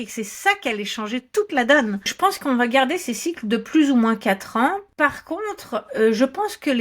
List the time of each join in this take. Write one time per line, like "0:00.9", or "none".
0:02.1
0:04.9